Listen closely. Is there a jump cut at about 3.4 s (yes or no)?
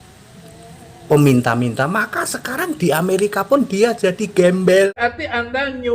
no